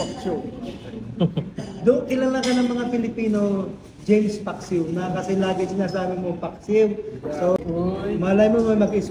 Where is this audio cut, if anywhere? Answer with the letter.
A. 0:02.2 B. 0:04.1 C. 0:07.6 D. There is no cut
C